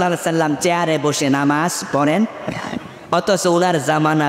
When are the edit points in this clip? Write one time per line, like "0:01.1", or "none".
none